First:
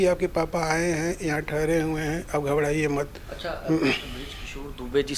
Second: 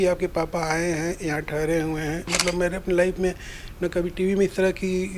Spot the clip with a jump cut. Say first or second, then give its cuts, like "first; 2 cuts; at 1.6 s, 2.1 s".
second; 1 cut; at 2.2 s